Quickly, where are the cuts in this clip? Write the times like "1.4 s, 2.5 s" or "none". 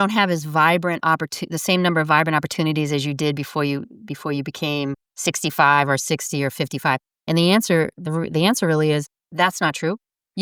none